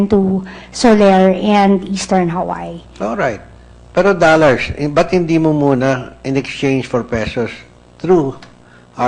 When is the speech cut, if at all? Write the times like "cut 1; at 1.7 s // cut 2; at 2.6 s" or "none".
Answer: cut 1; at 1.7 s